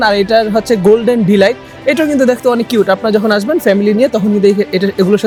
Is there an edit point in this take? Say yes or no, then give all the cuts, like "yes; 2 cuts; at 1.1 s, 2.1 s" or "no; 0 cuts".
no; 0 cuts